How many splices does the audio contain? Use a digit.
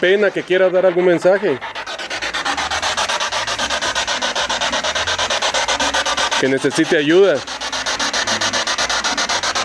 0